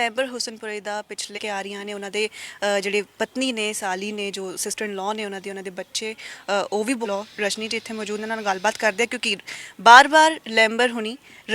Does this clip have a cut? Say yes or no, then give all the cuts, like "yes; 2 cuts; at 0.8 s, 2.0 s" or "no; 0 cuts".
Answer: yes; 2 cuts; at 1.4 s, 7.1 s